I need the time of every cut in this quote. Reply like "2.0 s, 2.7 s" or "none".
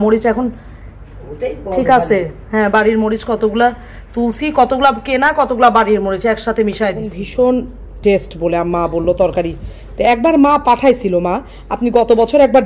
7.3 s